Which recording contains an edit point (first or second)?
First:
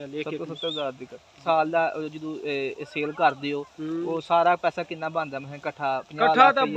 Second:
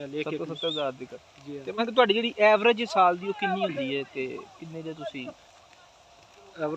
first